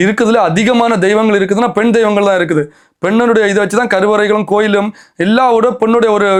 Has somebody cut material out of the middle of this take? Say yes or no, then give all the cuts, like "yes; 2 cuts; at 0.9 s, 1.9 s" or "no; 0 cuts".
no; 0 cuts